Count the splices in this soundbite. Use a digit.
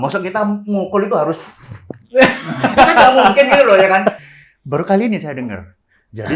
1